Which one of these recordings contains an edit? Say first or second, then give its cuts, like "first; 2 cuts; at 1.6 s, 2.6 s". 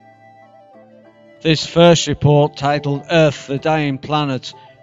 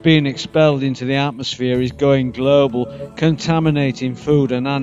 second; 1 cut; at 1.5 s